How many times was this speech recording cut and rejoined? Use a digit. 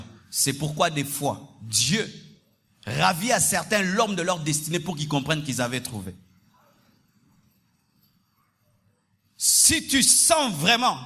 0